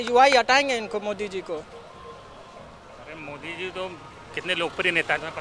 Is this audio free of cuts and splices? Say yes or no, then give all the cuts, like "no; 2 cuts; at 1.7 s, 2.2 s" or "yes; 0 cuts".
yes; 0 cuts